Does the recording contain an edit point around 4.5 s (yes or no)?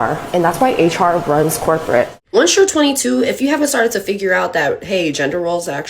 no